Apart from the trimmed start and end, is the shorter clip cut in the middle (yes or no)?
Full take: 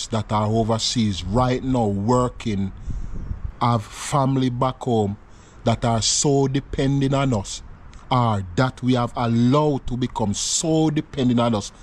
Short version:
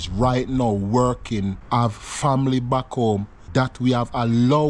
yes